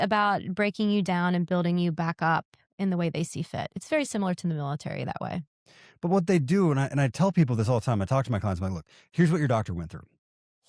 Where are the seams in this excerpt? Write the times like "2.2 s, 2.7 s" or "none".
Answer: none